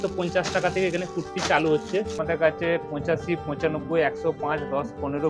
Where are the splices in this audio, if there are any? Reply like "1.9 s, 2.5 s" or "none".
2.2 s